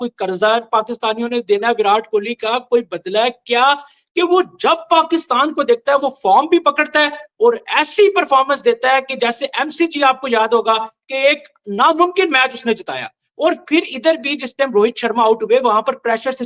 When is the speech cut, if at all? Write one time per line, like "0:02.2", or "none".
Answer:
none